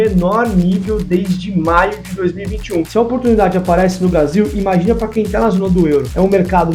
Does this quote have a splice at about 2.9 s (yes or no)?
yes